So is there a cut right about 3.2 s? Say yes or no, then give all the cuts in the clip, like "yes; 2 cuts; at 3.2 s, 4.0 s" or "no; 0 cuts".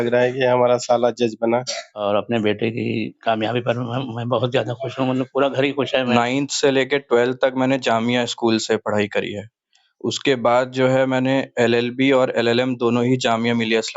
no; 2 cuts; at 1.9 s, 6.1 s